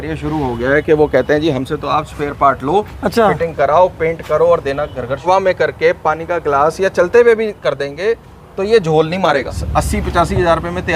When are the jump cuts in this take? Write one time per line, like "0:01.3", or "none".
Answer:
0:05.3
0:09.6